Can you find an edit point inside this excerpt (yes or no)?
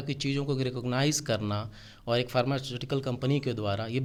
no